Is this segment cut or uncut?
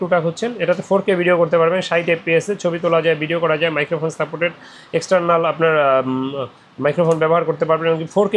uncut